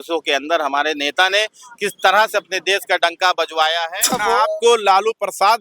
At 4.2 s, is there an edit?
yes; 1 cut; at 4.2 s

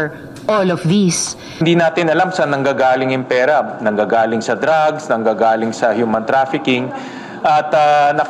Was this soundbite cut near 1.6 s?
yes; 1 cut; at 1.6 s

